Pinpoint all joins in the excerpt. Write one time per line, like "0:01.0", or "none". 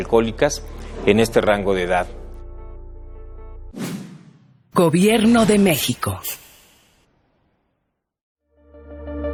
none